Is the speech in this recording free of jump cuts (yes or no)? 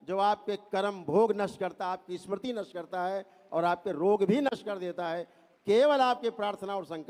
yes